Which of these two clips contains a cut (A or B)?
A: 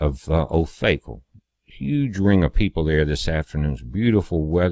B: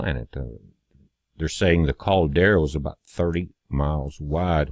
B